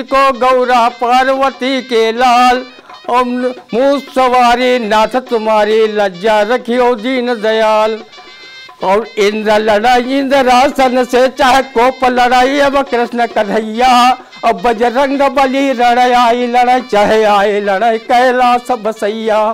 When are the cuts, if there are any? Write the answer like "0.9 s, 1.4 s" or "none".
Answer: 8.3 s